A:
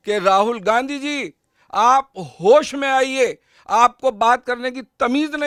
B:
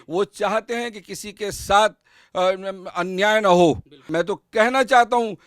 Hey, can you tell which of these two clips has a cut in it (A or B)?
B